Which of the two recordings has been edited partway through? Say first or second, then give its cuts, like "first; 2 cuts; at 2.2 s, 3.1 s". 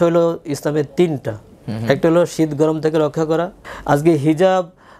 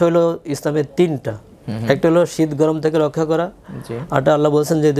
first; 1 cut; at 3.7 s